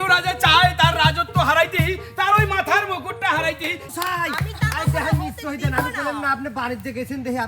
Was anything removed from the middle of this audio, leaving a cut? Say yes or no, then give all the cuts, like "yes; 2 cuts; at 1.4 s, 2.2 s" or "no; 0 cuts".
yes; 1 cut; at 3.9 s